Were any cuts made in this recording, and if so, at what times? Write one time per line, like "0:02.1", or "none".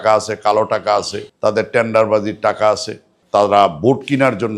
0:01.2
0:03.1